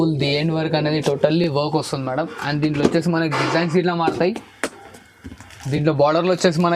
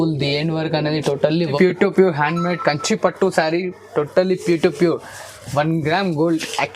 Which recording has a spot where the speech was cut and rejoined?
second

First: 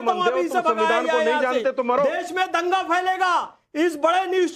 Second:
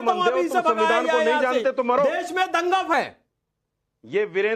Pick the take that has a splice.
second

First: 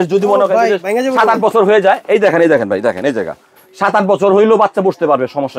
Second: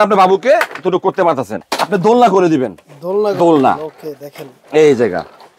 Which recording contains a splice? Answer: second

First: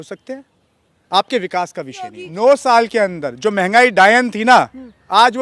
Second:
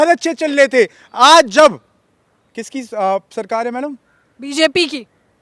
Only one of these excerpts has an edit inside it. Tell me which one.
first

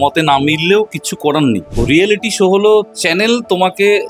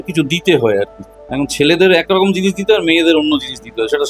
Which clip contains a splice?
first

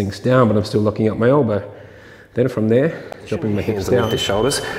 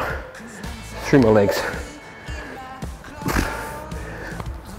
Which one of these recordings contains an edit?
first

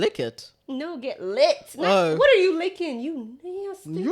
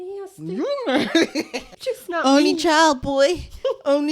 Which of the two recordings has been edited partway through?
second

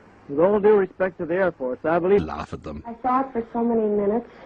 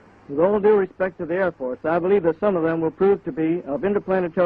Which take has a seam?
second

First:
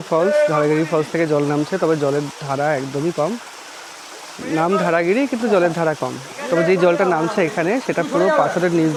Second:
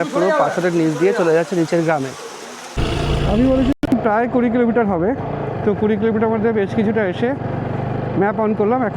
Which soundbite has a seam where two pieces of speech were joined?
second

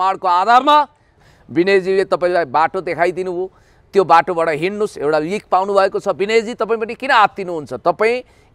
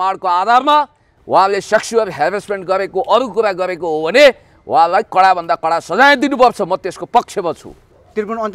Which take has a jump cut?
first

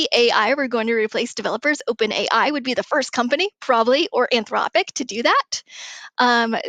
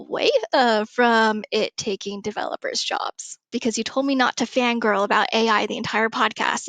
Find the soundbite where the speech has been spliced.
second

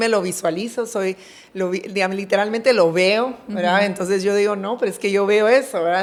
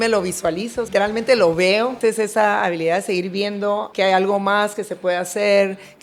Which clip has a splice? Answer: second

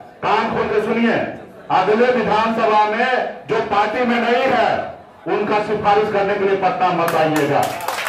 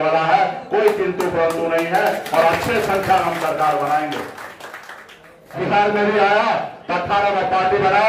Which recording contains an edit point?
second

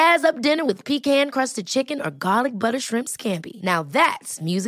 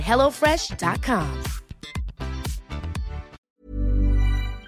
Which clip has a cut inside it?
second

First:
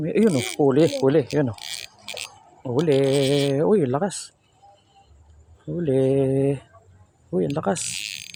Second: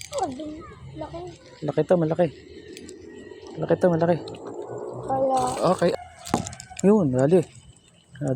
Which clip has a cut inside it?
second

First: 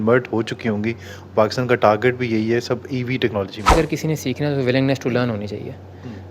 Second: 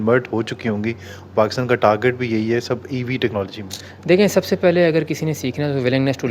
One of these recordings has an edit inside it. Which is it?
first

